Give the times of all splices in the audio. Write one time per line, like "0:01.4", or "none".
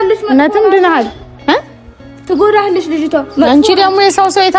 none